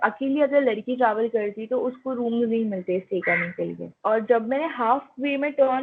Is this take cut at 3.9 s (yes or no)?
yes